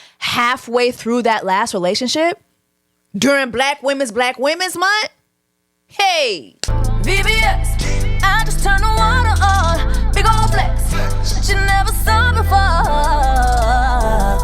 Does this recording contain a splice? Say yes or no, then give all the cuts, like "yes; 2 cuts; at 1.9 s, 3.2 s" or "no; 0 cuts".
yes; 1 cut; at 6.8 s